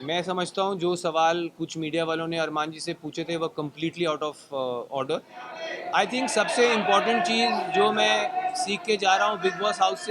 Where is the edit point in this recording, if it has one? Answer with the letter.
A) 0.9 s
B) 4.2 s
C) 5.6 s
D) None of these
C